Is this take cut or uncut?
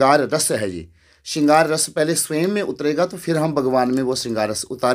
uncut